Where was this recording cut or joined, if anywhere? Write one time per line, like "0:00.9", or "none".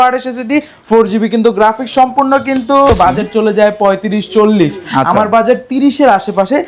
0:02.9